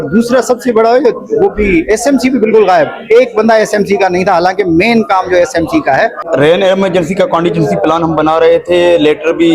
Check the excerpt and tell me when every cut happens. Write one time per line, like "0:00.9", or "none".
0:06.2